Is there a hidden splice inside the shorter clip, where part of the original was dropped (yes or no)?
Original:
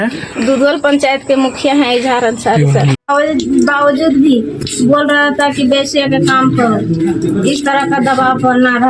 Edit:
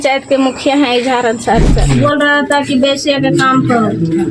yes